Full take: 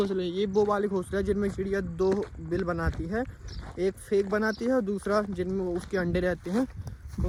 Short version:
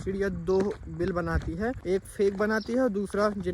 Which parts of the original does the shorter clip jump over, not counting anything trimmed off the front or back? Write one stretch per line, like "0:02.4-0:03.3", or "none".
0:03.3-0:03.7